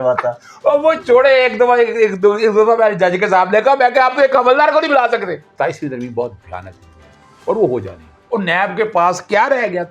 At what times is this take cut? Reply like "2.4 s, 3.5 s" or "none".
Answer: 5.4 s, 8.1 s